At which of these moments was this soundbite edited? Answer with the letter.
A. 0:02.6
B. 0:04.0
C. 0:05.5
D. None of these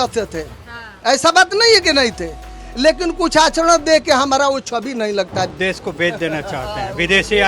C